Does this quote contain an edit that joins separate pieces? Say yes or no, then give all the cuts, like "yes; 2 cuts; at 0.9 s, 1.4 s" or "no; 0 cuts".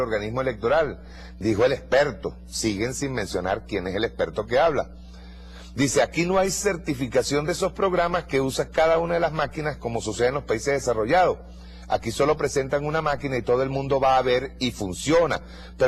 yes; 1 cut; at 13.3 s